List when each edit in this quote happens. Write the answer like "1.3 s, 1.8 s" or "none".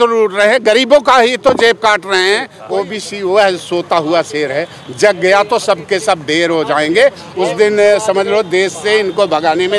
2.5 s, 7.2 s